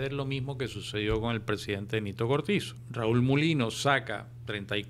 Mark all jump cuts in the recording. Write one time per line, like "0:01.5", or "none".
0:02.8